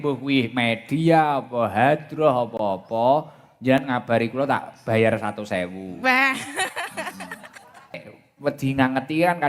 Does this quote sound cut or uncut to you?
cut